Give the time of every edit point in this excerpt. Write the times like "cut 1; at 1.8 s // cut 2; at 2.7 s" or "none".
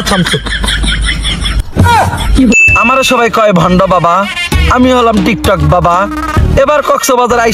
cut 1; at 2.5 s